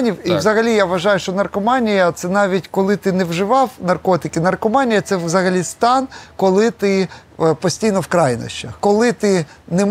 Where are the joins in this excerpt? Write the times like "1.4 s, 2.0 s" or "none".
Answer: 8.8 s